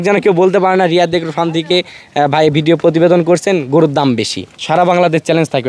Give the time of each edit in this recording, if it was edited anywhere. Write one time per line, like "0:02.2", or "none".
0:04.6